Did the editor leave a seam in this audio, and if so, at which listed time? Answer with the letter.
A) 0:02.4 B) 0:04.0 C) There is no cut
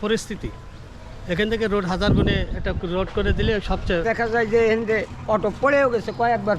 B